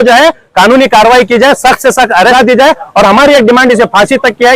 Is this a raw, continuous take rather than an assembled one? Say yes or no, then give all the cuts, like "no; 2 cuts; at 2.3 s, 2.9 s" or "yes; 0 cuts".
no; 1 cut; at 2.3 s